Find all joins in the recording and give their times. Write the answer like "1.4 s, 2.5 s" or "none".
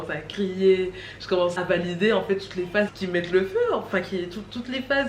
1.6 s, 3.0 s

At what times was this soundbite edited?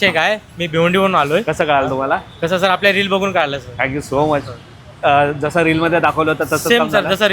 none

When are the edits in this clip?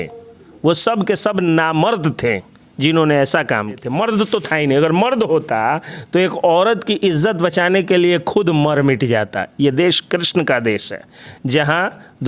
3.9 s

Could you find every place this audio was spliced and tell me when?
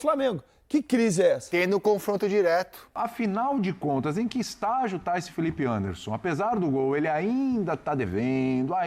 2.9 s

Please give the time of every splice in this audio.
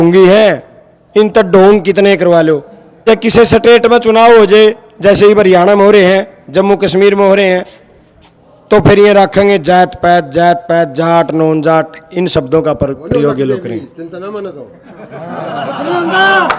3.0 s

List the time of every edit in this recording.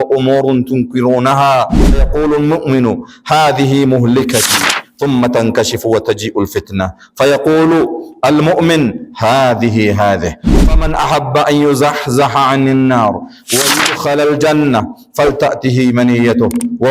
1.9 s

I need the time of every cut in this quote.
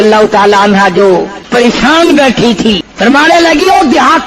1.4 s, 2.9 s

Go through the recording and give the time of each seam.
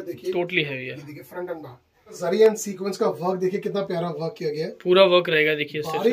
2.2 s

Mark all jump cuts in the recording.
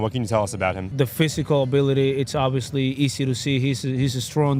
0.9 s

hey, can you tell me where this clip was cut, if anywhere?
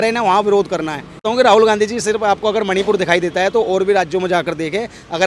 1.2 s

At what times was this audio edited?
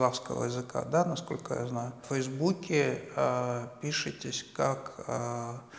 2.0 s

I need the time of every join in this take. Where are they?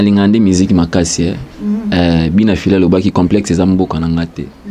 none

